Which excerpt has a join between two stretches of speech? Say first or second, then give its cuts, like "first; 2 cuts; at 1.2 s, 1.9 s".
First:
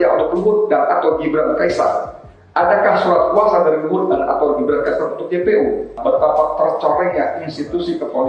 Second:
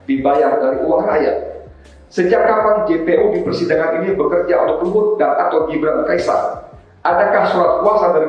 first; 1 cut; at 6.0 s